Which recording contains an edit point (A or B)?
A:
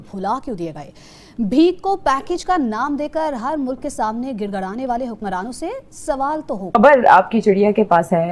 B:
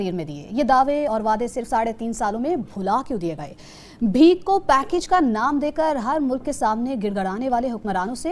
A